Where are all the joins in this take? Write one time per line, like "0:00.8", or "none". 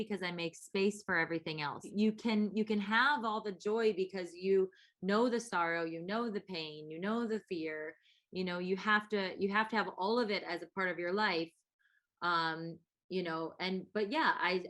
0:01.9